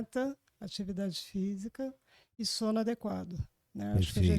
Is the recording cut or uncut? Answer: uncut